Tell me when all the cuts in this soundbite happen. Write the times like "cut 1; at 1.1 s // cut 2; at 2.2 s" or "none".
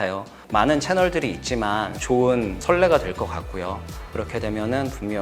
cut 1; at 2.0 s // cut 2; at 4.0 s